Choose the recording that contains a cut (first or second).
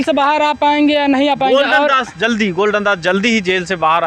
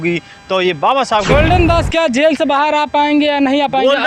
second